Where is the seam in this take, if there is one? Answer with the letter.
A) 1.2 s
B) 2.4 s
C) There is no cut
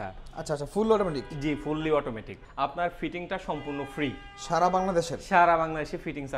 B